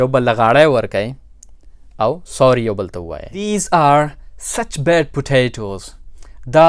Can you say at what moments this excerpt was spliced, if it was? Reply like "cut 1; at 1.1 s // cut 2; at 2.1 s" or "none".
cut 1; at 3.5 s

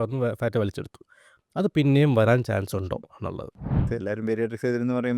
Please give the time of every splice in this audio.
cut 1; at 3.9 s

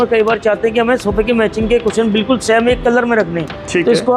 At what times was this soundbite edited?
none

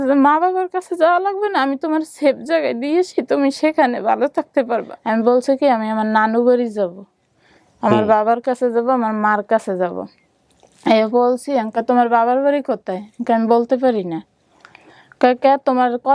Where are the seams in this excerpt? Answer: cut 1; at 4.9 s

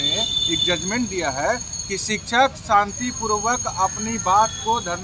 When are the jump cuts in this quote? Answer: none

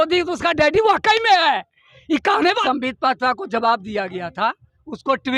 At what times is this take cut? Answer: cut 1; at 2.6 s

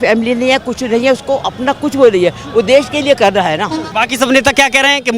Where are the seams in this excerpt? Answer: cut 1; at 3.9 s

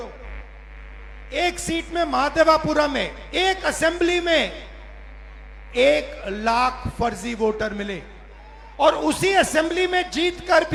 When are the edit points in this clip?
none

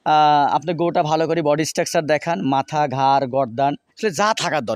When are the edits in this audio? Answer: none

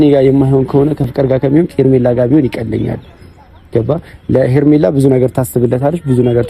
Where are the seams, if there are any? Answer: cut 1; at 1.1 s

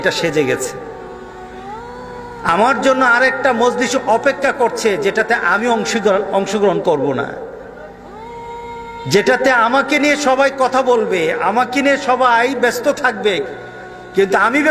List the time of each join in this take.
none

